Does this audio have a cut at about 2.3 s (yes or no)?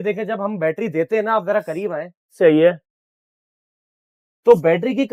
no